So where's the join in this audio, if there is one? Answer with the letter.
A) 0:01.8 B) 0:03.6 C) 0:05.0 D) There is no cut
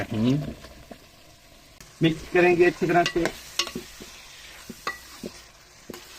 D